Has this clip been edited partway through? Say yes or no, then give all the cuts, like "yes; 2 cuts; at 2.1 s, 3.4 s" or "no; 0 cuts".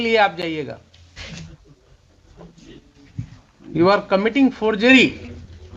no; 0 cuts